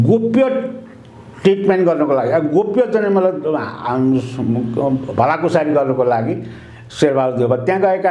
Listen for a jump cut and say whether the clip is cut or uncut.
uncut